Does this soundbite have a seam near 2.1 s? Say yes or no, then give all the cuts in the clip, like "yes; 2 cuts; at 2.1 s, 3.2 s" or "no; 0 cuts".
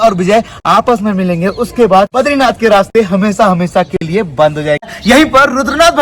yes; 2 cuts; at 2.1 s, 4.9 s